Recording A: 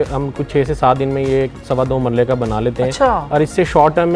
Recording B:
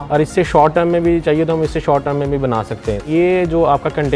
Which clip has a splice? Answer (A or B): B